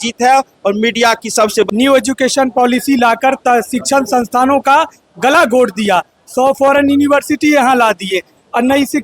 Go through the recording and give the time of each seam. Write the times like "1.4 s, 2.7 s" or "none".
1.7 s